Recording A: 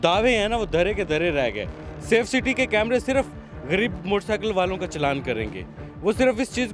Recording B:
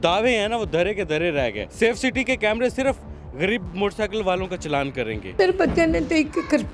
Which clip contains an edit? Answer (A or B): B